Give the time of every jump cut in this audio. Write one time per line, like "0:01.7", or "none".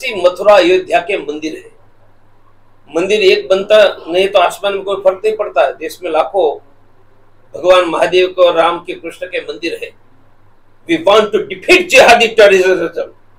none